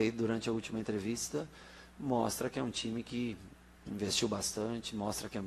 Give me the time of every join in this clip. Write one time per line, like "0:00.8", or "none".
0:03.6

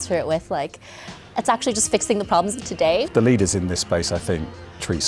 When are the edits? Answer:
0:03.1

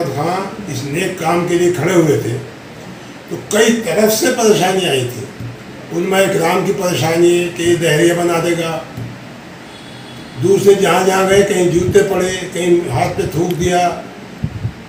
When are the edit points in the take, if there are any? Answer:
none

